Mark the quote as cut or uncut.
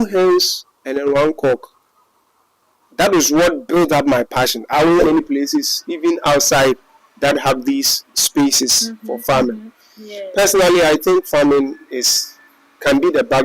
cut